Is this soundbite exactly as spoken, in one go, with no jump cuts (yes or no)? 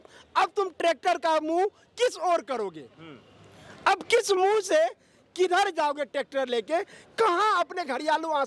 yes